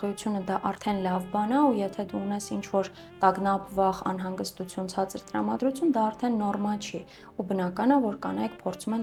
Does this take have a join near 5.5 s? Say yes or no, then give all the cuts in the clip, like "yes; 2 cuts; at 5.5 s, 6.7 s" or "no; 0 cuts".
no; 0 cuts